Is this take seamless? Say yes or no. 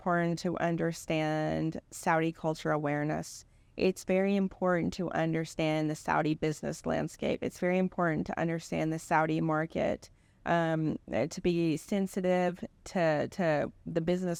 yes